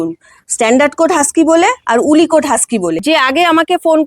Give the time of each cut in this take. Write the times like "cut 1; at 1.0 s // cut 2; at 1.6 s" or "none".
cut 1; at 3.0 s